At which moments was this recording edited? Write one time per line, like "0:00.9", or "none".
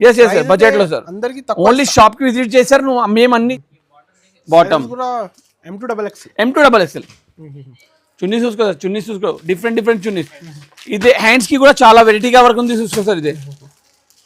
0:03.6

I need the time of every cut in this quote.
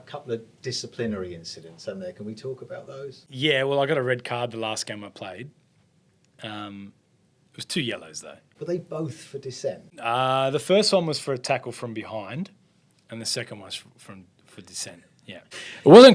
none

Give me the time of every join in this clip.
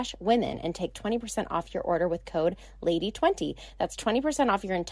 none

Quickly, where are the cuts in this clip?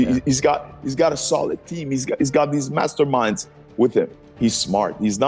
0:04.2

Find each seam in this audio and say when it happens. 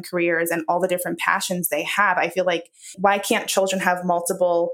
0:02.9

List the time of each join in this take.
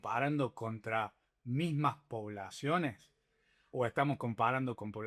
none

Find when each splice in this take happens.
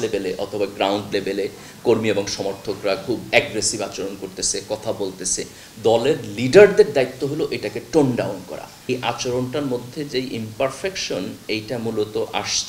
0:08.9

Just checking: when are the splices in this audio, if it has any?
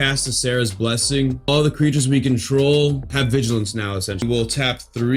0:01.5
0:03.1
0:04.2

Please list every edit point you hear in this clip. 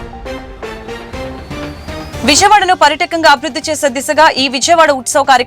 none

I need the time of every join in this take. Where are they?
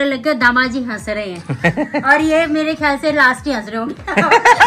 none

